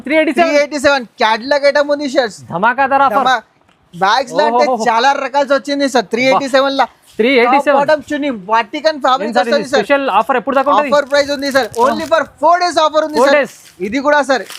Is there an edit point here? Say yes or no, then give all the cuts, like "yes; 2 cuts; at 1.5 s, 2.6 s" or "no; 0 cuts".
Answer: no; 0 cuts